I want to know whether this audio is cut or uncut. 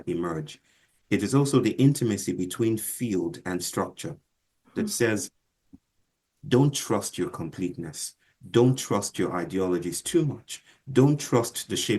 uncut